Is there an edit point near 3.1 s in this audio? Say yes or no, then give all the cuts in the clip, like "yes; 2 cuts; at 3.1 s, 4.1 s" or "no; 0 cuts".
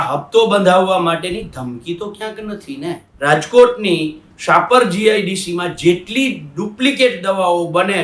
yes; 1 cut; at 3.1 s